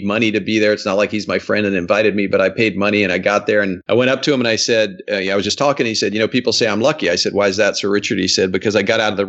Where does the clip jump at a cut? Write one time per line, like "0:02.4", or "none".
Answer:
0:03.8